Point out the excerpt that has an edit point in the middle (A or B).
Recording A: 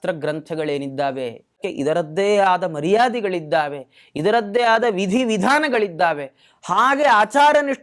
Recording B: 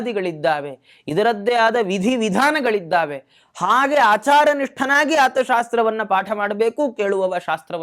A